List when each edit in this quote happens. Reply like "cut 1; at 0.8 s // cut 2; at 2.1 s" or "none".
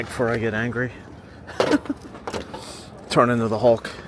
none